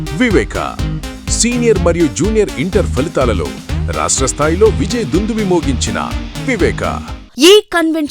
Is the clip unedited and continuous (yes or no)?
no